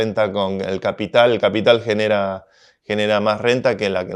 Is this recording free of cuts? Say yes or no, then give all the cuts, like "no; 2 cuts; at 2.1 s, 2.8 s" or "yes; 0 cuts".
yes; 0 cuts